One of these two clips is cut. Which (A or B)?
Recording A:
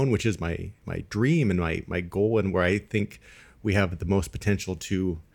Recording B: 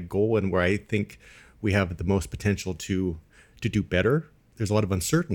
B